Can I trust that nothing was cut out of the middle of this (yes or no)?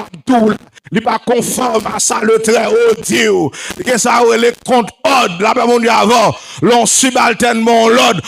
yes